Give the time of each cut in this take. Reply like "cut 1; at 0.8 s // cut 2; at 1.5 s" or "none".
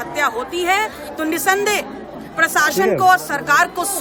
none